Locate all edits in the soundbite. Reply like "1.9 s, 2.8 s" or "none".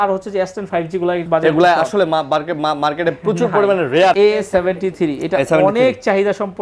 1.2 s, 4.2 s